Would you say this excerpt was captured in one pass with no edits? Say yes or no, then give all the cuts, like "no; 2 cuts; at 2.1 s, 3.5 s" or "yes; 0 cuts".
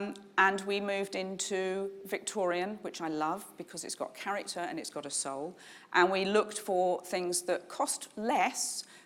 yes; 0 cuts